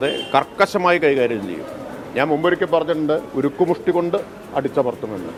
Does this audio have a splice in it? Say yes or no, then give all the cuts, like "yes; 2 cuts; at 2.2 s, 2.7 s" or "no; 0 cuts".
no; 0 cuts